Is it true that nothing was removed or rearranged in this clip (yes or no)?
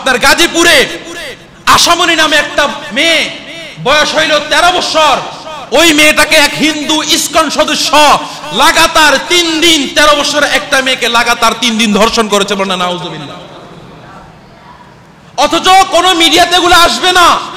yes